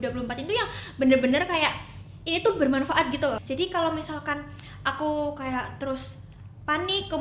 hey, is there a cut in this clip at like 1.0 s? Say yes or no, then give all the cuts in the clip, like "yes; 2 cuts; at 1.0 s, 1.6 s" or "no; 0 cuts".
no; 1 cut; at 3.4 s